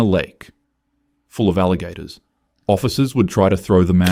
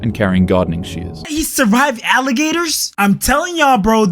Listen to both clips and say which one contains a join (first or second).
second